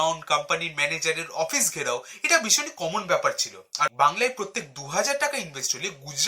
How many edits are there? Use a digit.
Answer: 1